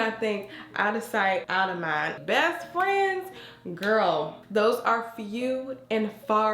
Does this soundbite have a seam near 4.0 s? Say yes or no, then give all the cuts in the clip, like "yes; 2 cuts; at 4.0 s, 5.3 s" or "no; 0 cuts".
no; 1 cut; at 2.2 s